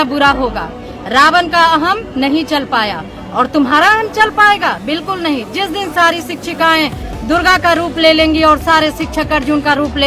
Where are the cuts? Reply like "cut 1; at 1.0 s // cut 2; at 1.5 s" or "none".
none